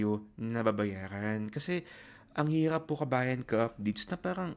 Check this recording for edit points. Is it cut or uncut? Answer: uncut